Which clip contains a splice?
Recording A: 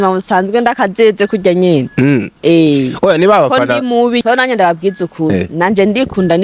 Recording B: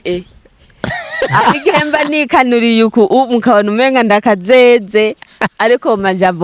A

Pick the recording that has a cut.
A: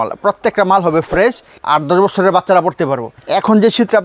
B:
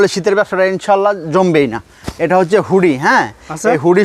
A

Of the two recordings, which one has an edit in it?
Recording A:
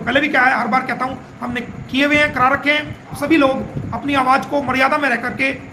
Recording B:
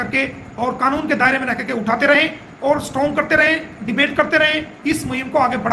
A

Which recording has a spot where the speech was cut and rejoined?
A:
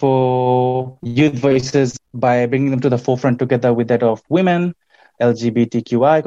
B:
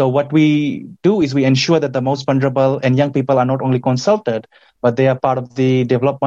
A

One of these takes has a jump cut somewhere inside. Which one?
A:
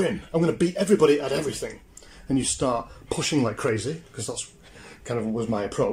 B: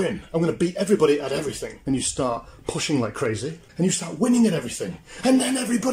B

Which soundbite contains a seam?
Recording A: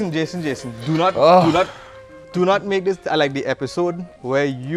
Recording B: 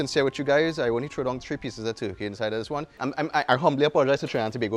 B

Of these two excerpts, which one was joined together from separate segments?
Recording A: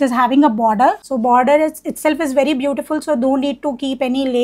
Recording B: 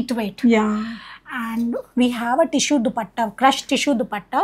A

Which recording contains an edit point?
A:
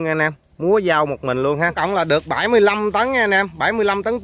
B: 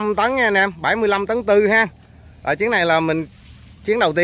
A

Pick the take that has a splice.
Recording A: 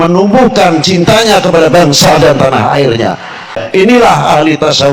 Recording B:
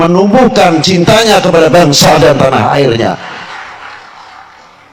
A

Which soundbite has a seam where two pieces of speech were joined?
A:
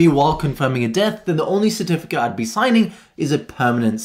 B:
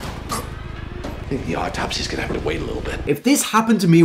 B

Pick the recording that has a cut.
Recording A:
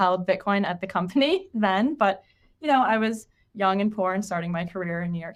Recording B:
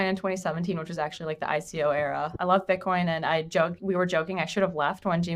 B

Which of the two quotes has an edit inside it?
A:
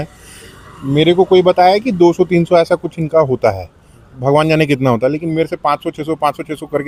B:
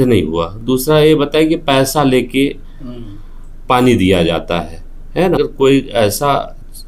B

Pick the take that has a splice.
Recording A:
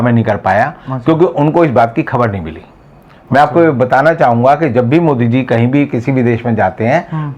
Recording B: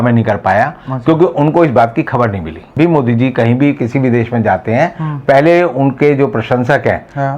B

